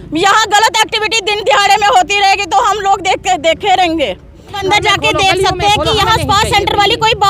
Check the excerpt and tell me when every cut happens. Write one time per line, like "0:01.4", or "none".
0:04.6